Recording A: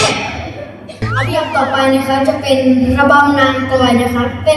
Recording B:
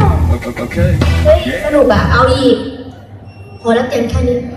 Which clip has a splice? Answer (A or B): A